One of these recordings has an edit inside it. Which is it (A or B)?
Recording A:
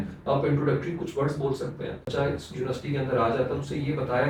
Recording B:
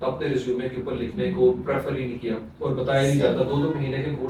A